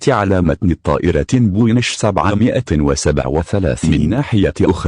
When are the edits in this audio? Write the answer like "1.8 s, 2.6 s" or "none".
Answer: 3.8 s